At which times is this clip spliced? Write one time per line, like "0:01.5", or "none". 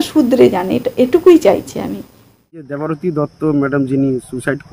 0:02.8